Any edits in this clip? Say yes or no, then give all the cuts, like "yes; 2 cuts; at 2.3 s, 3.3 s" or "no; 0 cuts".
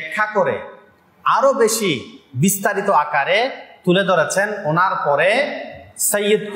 no; 0 cuts